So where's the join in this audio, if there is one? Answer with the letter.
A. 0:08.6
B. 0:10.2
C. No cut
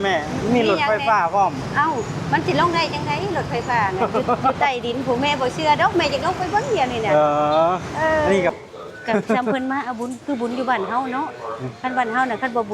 A